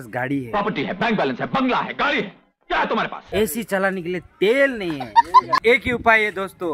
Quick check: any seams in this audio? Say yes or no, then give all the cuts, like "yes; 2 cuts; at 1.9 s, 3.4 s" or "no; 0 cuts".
yes; 2 cuts; at 3.2 s, 5.6 s